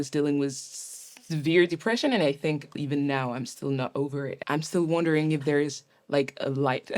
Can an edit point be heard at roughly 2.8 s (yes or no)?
yes